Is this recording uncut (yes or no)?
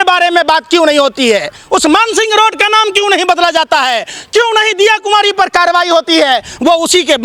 yes